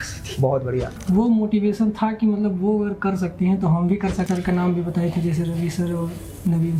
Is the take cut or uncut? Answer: cut